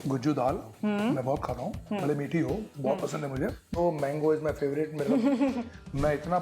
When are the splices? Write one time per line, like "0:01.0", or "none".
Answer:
0:03.8